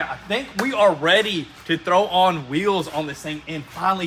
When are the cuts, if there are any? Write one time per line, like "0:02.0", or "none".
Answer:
none